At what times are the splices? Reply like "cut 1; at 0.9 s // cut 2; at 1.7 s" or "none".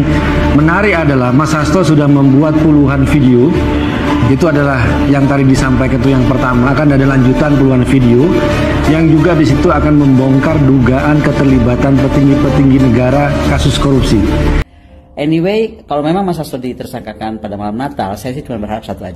cut 1; at 14.6 s